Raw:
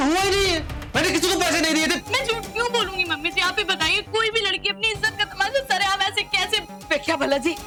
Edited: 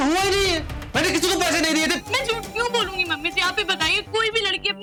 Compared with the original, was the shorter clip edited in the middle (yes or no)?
no